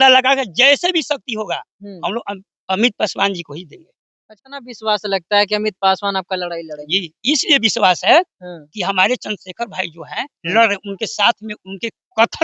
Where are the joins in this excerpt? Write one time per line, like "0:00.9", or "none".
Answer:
0:04.3